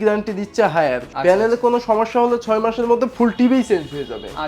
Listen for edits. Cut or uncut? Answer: cut